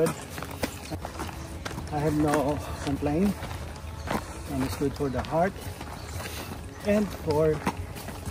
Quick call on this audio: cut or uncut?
cut